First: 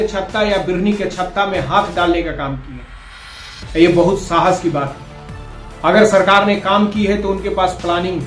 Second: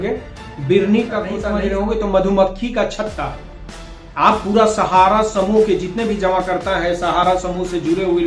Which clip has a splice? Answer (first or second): second